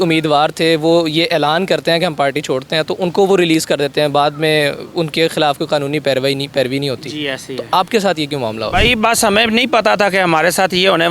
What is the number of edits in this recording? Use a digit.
0